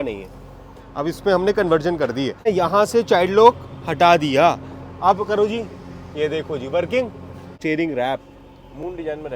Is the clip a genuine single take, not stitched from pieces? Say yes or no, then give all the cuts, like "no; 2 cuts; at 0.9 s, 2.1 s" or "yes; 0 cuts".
no; 2 cuts; at 2.5 s, 7.4 s